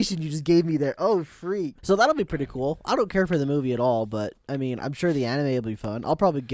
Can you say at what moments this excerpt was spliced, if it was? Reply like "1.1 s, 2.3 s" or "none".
1.7 s